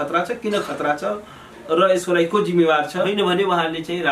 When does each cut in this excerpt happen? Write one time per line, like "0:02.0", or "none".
0:03.1